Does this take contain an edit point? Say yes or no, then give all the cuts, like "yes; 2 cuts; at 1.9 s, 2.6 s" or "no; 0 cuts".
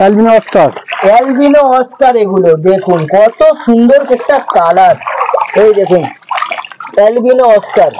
no; 0 cuts